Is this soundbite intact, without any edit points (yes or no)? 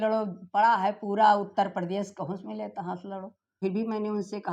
no